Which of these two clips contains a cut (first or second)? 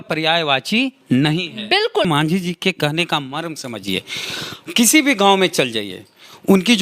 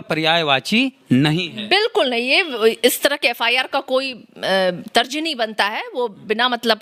first